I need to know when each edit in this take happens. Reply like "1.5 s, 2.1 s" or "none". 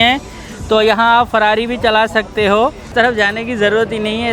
2.8 s